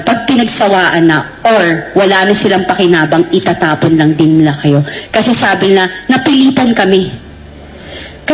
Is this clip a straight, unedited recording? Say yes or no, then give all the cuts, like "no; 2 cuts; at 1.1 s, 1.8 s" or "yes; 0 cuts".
no; 1 cut; at 5.0 s